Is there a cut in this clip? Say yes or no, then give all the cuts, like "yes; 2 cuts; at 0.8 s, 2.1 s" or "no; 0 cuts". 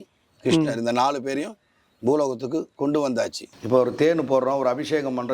yes; 1 cut; at 3.5 s